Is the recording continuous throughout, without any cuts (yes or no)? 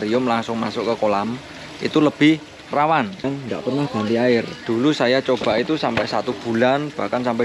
no